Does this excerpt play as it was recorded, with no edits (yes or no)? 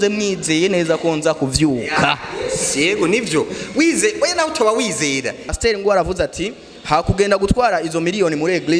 no